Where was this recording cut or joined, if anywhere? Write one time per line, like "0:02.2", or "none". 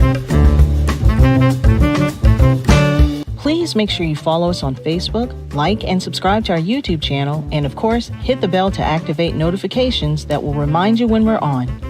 0:03.3